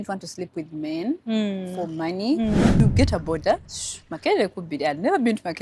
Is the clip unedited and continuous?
no; 1 cut; at 2.8 s

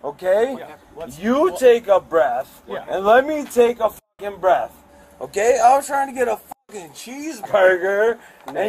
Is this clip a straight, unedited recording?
yes; 0 cuts

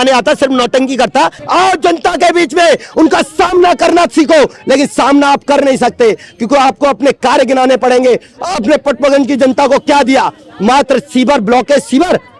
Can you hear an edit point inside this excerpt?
yes; 1 cut; at 1.4 s

